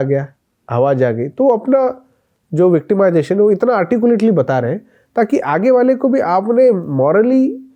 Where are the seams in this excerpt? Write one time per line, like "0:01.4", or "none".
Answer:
none